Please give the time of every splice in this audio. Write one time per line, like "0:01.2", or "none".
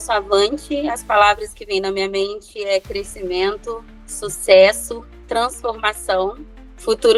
none